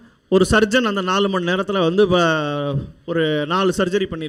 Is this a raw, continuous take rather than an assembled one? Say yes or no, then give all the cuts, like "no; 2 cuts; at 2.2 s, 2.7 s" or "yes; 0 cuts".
yes; 0 cuts